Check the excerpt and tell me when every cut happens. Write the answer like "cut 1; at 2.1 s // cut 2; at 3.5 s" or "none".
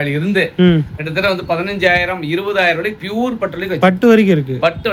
none